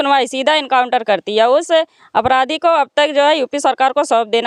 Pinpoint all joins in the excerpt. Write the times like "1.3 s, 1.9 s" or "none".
none